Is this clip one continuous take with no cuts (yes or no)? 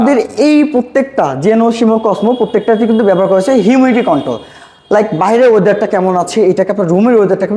yes